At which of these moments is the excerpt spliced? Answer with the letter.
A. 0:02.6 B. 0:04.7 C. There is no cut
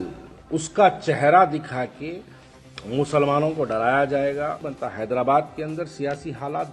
B